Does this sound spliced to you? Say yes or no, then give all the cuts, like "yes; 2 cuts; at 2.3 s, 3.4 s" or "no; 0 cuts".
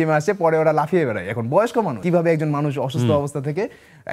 yes; 1 cut; at 2.0 s